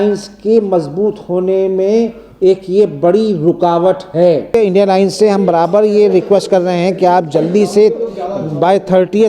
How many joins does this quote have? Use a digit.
1